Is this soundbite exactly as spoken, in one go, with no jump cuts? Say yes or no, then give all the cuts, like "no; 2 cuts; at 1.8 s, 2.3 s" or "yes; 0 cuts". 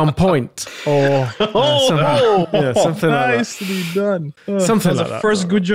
no; 1 cut; at 4.3 s